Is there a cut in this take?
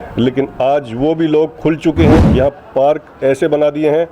yes; 1 cut; at 2.3 s

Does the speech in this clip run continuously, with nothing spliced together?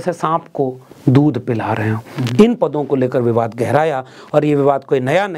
yes; 0 cuts

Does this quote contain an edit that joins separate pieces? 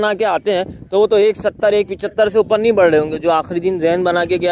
no; 0 cuts

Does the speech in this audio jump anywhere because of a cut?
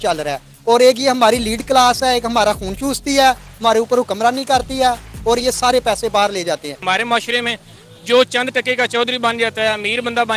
yes; 1 cut; at 6.8 s

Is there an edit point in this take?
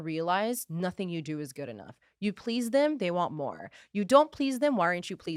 no; 0 cuts

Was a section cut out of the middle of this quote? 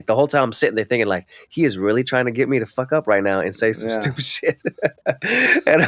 no; 0 cuts

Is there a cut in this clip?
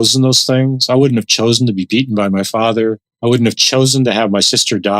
yes; 1 cut; at 3.1 s

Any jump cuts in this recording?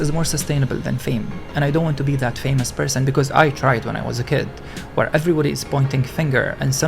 no; 0 cuts

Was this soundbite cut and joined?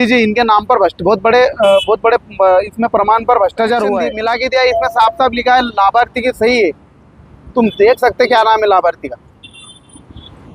yes; 1 cut; at 4.1 s

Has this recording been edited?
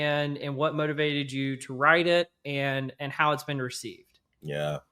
no; 0 cuts

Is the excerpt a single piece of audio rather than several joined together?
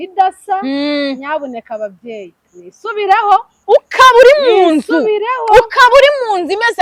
yes; 0 cuts

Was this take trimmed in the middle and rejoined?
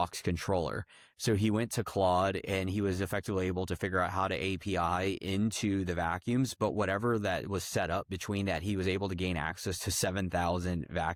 no; 0 cuts

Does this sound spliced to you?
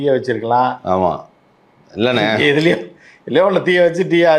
no; 0 cuts

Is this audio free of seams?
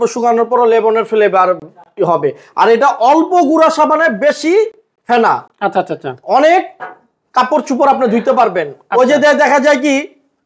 yes; 0 cuts

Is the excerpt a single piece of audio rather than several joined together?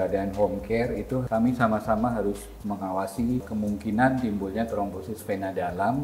no; 2 cuts; at 1.2 s, 3.5 s

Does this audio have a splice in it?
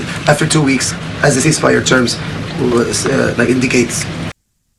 no; 0 cuts

